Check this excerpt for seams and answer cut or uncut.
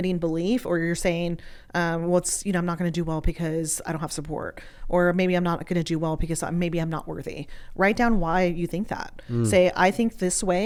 uncut